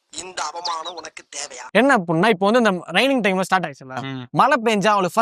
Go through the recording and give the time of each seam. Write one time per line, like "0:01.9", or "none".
0:01.6